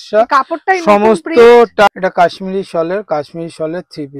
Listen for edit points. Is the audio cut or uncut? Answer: cut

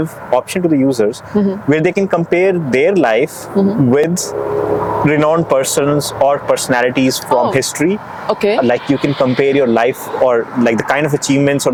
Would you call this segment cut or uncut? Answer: uncut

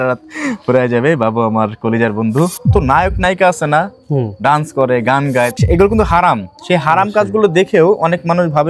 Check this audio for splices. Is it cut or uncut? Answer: cut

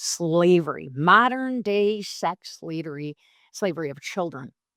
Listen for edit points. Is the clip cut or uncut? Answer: uncut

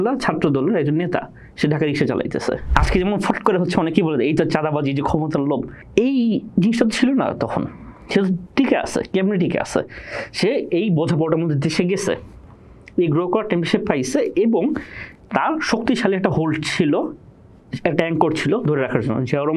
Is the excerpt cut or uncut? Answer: cut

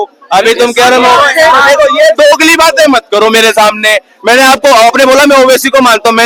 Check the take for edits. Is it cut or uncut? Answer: uncut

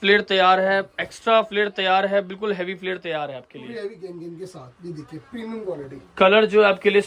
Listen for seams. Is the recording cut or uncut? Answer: uncut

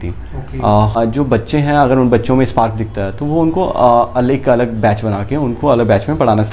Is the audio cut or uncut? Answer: cut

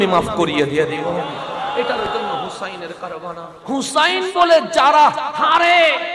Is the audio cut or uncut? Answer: cut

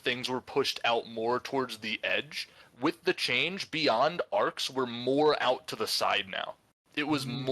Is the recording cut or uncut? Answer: cut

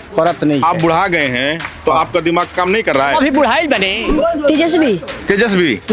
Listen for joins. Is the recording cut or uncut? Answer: cut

